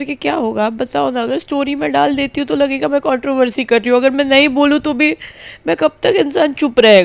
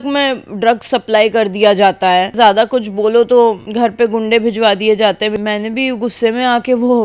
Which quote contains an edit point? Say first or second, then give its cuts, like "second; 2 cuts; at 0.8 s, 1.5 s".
second; 3 cuts; at 2.3 s, 3.6 s, 5.3 s